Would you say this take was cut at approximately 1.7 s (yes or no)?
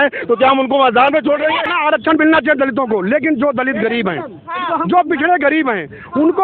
yes